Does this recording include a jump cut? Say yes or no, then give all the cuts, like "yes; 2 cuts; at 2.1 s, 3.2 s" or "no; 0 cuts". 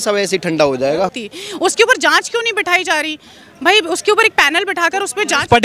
yes; 1 cut; at 1.2 s